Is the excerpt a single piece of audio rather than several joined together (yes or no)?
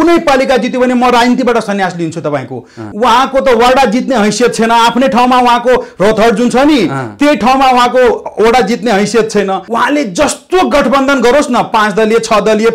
no